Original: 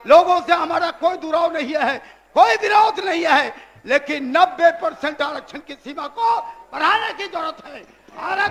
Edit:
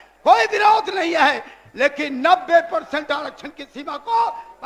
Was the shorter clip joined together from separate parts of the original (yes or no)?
no